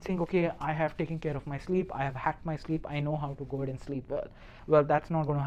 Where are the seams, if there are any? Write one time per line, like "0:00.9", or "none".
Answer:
none